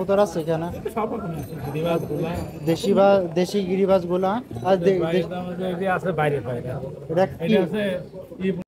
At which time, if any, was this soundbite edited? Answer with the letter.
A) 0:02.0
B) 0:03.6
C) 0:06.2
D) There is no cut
D